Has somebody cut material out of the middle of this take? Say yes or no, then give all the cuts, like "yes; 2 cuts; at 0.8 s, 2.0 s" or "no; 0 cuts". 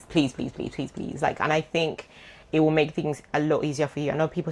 no; 0 cuts